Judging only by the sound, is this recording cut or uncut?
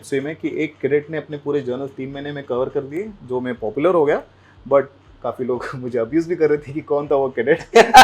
uncut